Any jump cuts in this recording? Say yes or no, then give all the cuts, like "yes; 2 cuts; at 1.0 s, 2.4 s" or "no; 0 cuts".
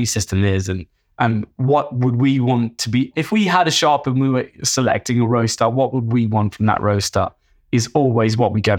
no; 0 cuts